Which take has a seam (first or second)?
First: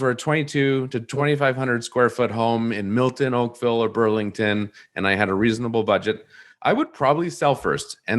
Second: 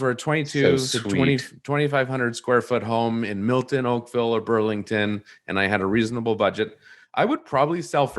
first